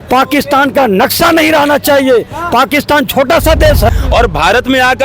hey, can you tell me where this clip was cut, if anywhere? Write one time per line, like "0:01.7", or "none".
0:03.8